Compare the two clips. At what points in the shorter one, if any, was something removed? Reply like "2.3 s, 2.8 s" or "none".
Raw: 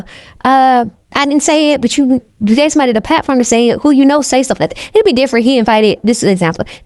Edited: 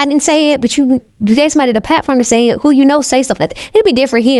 none